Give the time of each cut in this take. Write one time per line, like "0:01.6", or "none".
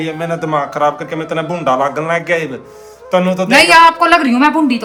none